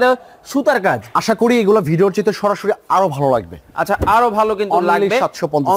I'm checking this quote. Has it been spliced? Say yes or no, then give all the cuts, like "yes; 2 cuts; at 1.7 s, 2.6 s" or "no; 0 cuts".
no; 0 cuts